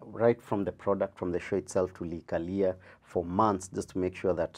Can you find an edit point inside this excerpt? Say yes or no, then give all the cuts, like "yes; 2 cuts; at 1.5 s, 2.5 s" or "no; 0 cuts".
no; 0 cuts